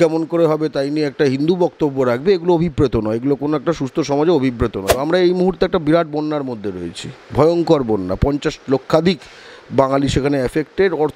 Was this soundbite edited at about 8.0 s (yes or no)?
no